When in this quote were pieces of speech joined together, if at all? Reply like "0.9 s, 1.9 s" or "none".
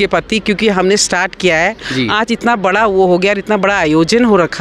none